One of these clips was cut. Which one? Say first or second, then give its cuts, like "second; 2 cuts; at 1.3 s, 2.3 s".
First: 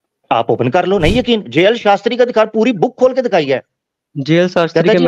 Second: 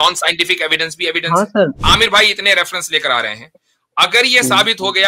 second; 1 cut; at 1.8 s